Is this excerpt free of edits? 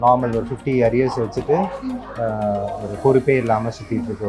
yes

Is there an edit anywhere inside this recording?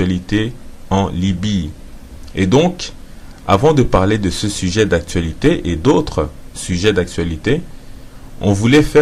no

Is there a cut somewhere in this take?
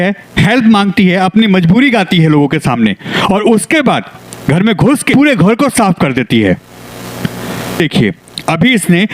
yes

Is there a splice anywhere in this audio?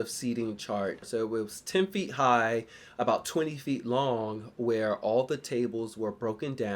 yes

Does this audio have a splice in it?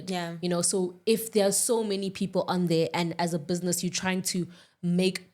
no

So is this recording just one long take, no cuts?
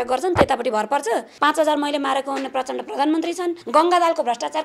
no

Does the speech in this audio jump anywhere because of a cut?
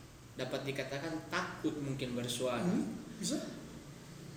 no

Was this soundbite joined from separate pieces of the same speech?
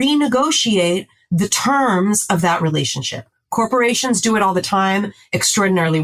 no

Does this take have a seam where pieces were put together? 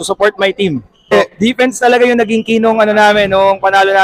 yes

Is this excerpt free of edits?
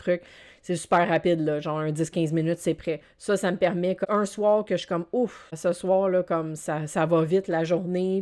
no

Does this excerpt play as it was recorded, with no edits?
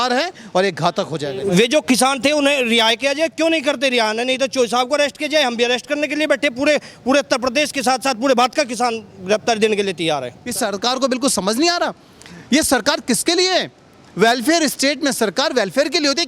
no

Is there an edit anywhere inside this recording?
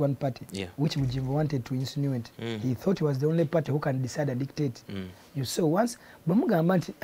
no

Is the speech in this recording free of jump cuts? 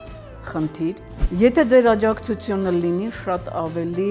no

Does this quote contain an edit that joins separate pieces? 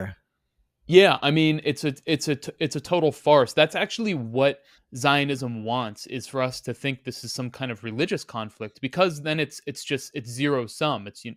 no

